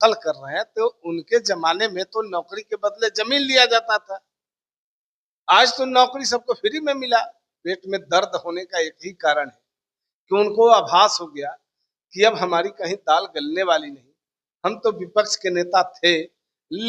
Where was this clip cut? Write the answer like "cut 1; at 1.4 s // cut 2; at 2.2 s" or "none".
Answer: cut 1; at 7.4 s